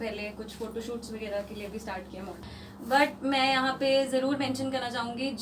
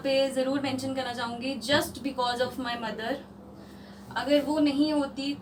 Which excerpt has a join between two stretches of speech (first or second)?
first